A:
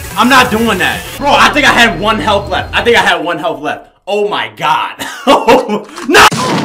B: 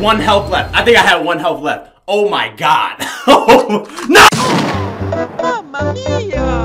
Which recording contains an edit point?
A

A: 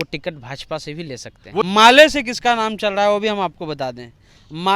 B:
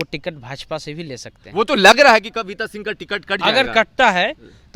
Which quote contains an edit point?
A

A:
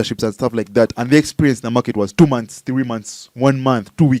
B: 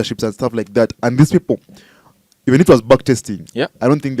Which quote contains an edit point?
A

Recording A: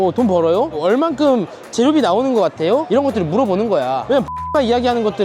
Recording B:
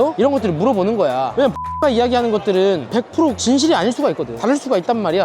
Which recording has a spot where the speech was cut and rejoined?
B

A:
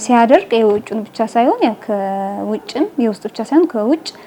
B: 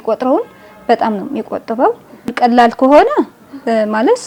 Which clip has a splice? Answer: B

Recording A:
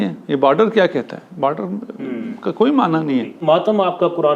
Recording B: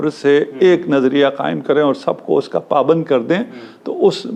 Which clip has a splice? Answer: A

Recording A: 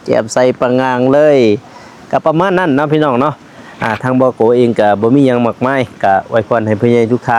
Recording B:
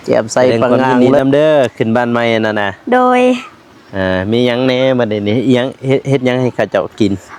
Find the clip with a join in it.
B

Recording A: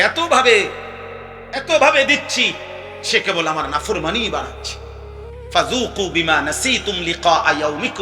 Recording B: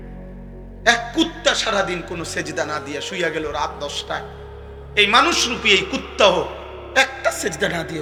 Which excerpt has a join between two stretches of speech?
A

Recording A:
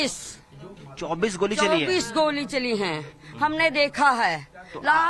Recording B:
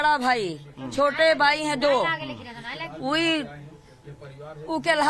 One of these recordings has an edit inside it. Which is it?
A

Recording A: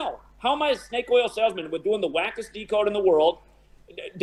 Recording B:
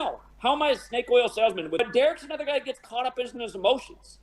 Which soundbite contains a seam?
B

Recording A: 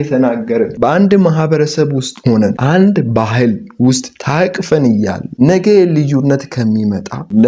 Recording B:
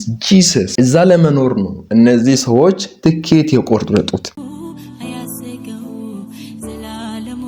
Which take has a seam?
B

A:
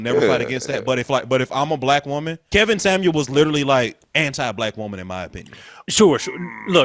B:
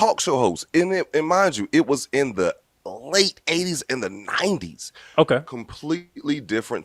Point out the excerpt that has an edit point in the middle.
A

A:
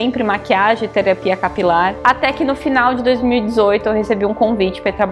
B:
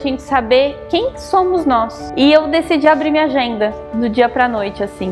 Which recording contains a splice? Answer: B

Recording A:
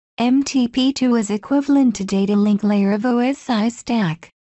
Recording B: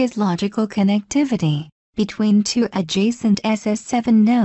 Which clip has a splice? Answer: A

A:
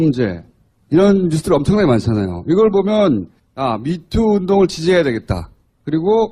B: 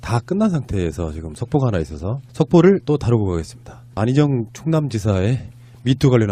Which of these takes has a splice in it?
B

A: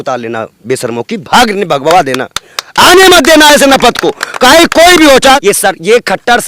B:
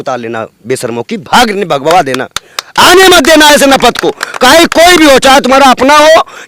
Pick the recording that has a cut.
A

